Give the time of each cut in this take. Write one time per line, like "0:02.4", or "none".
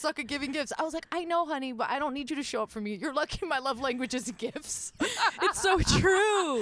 none